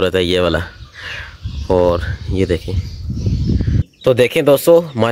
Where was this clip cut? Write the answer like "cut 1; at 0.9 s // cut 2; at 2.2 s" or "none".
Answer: cut 1; at 3.9 s